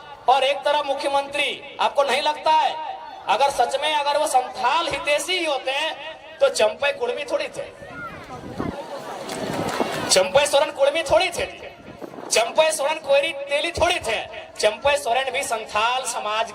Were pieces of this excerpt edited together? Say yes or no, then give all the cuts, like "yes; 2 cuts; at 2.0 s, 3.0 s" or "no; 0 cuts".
no; 0 cuts